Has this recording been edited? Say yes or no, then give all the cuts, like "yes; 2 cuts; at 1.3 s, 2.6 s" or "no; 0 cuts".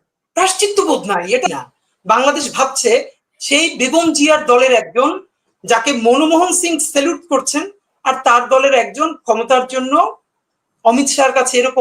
yes; 1 cut; at 1.5 s